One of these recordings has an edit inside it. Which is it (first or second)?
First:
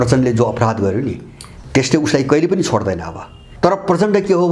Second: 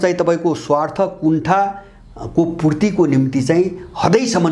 first